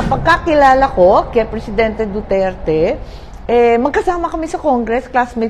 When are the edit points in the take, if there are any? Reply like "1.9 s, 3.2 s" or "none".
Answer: none